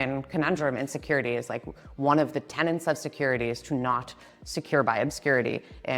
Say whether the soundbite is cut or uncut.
uncut